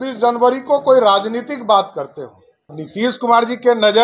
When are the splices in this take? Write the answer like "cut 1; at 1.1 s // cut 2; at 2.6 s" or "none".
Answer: cut 1; at 2.8 s